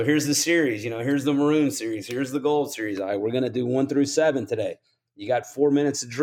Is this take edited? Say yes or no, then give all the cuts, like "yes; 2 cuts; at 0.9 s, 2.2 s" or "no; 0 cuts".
no; 0 cuts